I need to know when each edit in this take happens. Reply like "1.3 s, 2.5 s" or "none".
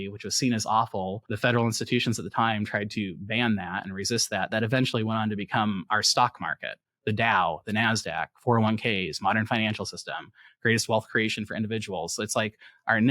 1.2 s

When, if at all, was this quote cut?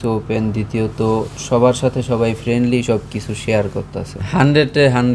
4.1 s

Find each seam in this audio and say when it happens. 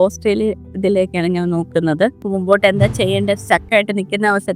2.2 s

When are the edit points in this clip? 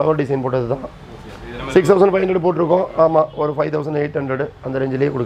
none

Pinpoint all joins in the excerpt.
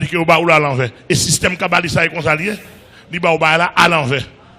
2.1 s

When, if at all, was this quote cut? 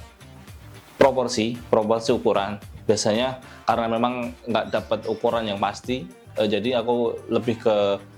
none

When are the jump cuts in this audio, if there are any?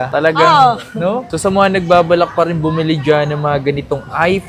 1.2 s

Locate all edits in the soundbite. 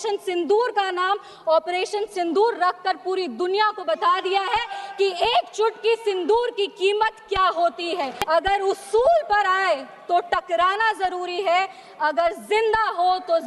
8.1 s

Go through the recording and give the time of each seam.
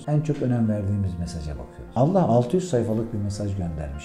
none

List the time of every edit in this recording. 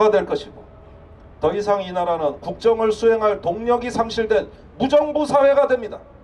none

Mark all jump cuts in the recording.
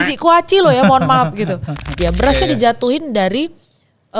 2.0 s

